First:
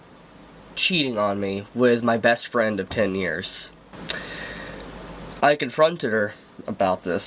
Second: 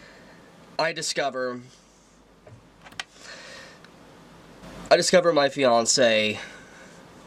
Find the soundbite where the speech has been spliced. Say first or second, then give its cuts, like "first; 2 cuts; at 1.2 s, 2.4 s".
first; 1 cut; at 3.9 s